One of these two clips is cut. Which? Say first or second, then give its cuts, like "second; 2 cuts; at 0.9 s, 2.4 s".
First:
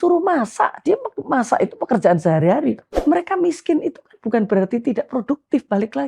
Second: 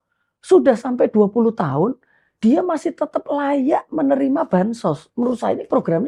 first; 1 cut; at 2.9 s